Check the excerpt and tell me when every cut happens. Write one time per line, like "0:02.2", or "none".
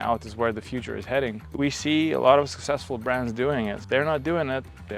0:01.5
0:03.8